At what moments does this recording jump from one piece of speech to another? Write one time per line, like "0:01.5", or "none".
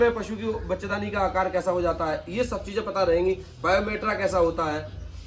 none